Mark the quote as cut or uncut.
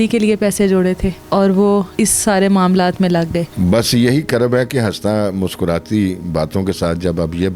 cut